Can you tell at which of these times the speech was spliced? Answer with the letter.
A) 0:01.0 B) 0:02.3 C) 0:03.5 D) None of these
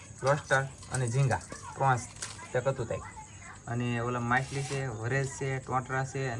D